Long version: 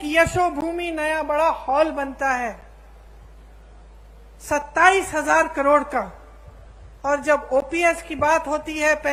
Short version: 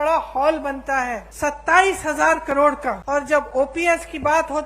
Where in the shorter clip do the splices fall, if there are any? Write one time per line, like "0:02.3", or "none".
0:01.3
0:03.0

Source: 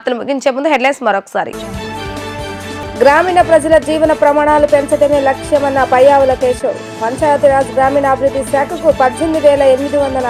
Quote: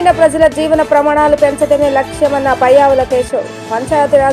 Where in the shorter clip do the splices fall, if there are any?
none

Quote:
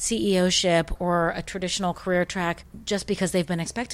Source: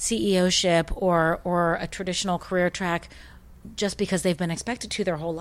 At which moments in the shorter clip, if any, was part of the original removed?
0:00.9
0:02.7

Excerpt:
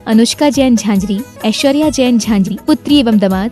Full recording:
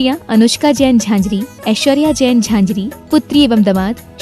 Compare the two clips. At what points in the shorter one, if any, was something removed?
0:02.5

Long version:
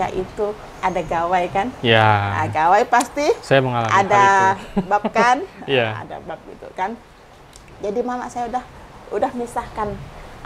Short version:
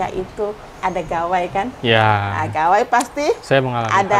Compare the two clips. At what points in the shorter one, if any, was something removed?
none

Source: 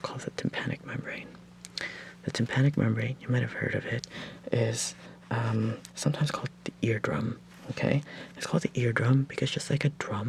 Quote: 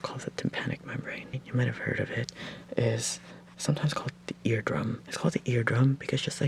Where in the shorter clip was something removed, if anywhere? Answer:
0:01.4
0:03.5
0:05.1

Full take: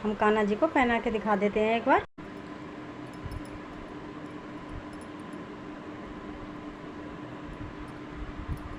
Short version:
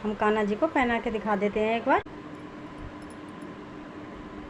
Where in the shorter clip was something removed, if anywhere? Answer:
0:02.1

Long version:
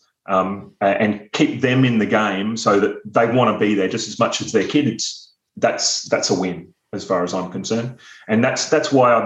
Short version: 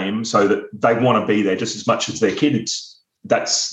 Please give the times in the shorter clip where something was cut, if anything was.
none

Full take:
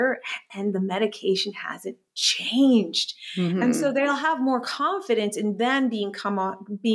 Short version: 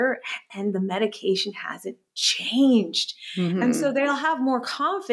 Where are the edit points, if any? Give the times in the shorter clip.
none

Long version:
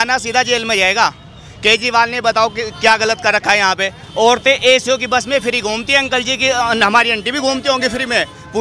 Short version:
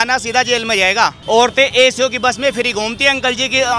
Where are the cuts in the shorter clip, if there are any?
0:01.2

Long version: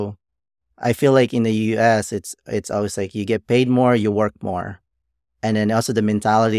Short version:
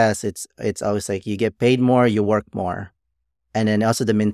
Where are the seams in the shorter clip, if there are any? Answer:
none

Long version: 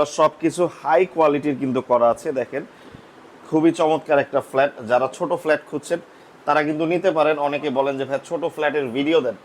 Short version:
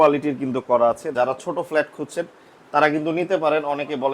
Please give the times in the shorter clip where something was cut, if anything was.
0:01.1

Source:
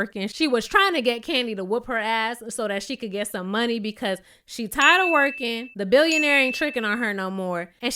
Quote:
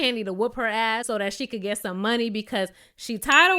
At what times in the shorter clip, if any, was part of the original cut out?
0:01.0

